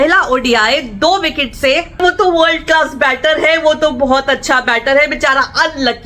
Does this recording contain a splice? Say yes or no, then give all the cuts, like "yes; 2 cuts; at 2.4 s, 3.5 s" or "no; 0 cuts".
yes; 1 cut; at 2.0 s